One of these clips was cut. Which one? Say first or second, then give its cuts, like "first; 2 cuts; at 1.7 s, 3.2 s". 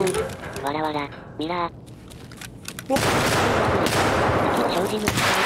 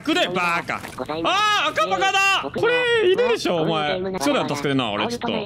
second; 3 cuts; at 0.9 s, 2.6 s, 4.2 s